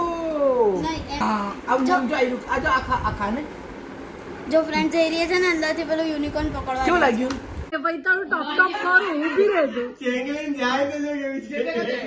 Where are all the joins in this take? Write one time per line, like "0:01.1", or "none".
0:07.7